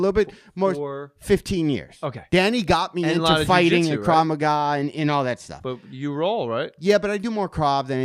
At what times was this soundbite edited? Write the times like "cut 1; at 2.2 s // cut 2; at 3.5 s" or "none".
cut 1; at 6.7 s